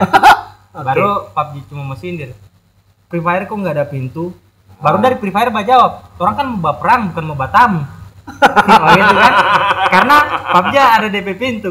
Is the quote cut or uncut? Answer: uncut